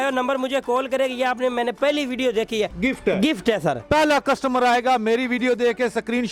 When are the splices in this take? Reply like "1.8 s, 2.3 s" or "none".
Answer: 2.7 s, 3.8 s